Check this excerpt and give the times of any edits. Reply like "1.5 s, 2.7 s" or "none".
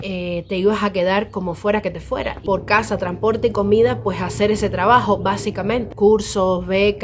2.4 s, 5.9 s